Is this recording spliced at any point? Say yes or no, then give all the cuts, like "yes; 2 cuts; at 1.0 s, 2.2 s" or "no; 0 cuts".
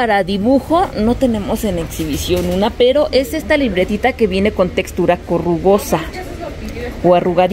no; 0 cuts